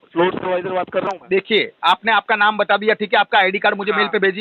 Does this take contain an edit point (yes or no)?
no